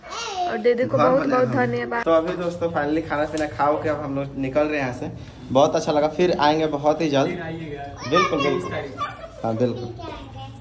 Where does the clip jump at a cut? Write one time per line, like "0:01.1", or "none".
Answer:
none